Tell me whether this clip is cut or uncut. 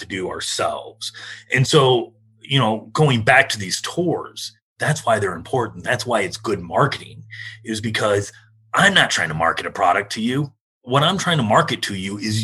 cut